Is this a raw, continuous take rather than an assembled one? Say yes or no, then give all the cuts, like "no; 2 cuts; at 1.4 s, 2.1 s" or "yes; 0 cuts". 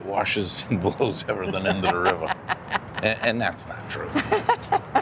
yes; 0 cuts